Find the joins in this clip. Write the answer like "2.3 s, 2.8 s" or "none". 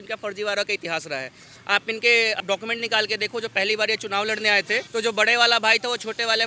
2.4 s, 4.9 s

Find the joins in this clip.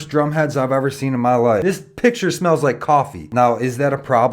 1.6 s, 3.2 s

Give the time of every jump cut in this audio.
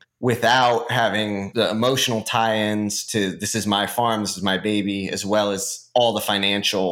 1.5 s

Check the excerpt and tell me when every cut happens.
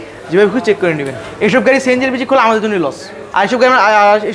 1.2 s

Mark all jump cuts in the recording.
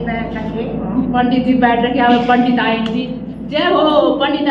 none

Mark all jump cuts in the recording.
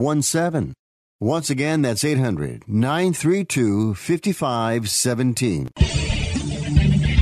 5.7 s

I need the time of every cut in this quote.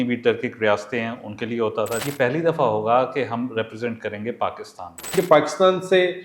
2.0 s, 5.1 s

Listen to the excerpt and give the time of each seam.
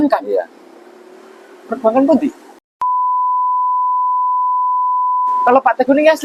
none

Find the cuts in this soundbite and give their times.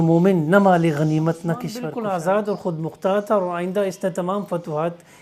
1.7 s

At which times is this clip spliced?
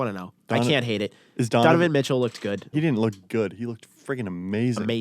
2.7 s

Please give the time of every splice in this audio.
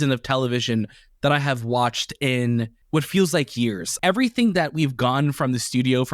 2.8 s, 3.9 s

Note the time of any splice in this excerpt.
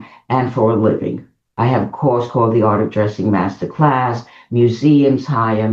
1.4 s

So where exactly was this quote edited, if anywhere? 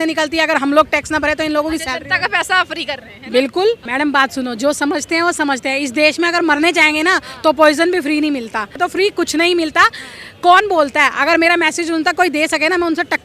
3.8 s, 8.7 s

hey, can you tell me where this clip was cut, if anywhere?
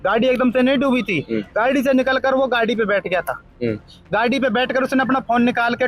none

